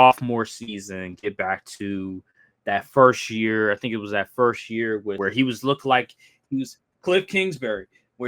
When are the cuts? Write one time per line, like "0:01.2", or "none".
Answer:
0:05.2